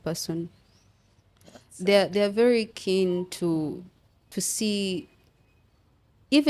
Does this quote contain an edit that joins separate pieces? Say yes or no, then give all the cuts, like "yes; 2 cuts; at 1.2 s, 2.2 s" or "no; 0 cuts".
no; 0 cuts